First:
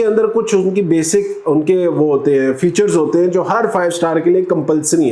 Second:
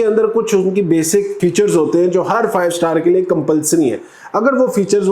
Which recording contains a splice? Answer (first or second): second